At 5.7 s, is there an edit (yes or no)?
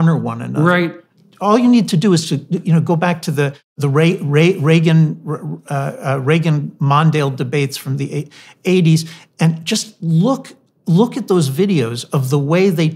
no